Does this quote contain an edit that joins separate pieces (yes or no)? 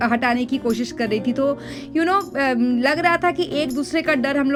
no